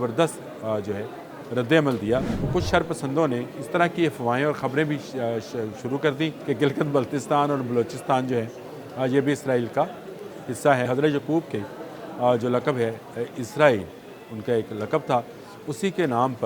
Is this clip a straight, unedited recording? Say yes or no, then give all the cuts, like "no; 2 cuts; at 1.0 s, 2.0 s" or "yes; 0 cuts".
no; 3 cuts; at 2.4 s, 6.4 s, 10.9 s